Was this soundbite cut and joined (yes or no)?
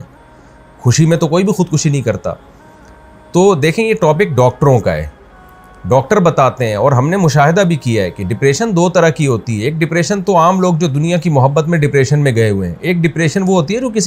no